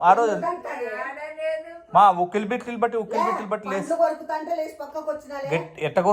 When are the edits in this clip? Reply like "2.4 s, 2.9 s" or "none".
none